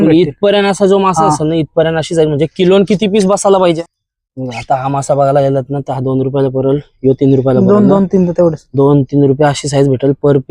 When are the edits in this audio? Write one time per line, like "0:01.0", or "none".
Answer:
0:03.9